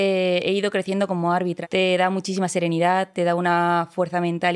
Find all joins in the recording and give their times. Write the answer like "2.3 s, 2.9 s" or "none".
1.6 s

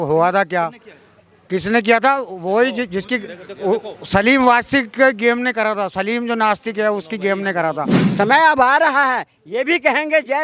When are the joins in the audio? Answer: 8.0 s

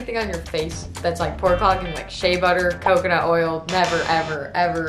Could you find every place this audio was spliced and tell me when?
none

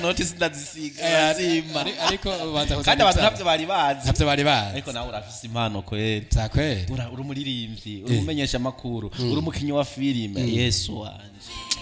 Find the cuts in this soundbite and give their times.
none

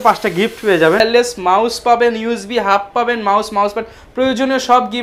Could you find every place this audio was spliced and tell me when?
1.0 s

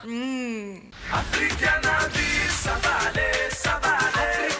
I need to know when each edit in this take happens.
0.9 s

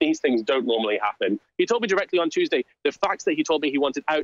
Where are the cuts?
1.5 s

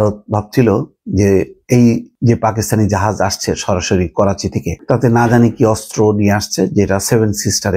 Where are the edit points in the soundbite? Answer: 2.1 s, 4.8 s

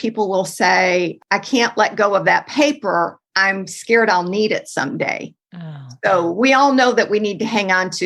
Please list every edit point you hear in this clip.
1.2 s

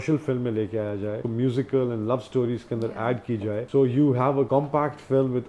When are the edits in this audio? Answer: 1.2 s, 3.6 s, 4.5 s

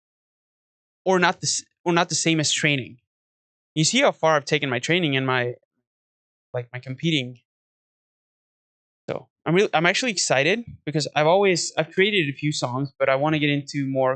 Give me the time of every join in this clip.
none

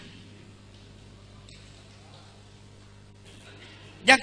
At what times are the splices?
3.3 s

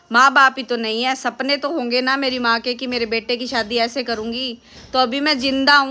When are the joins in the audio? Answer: none

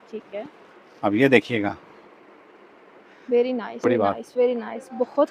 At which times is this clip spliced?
3.8 s

